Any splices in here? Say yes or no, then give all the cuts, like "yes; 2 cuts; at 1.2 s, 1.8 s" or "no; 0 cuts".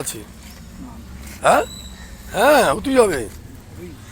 no; 0 cuts